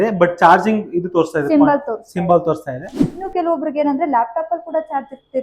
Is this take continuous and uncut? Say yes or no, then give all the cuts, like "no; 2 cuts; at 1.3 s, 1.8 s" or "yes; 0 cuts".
no; 1 cut; at 3.3 s